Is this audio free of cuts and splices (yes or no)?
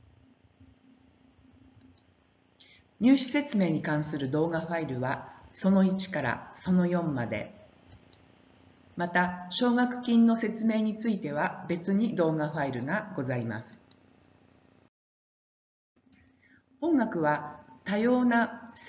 no